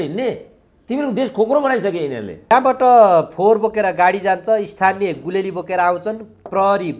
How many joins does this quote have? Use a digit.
1